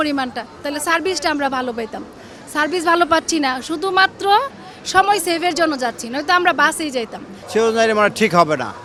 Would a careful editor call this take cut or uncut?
uncut